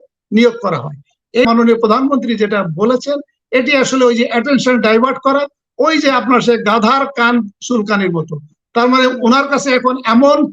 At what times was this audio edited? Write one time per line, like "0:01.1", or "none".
0:01.5